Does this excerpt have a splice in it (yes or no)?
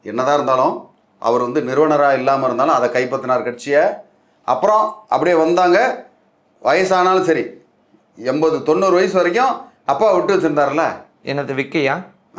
no